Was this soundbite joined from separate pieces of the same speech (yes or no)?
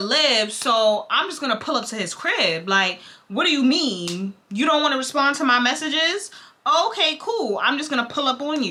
no